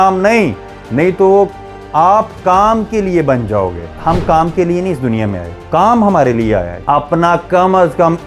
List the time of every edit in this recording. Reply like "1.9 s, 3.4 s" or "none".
3.9 s, 5.6 s, 6.7 s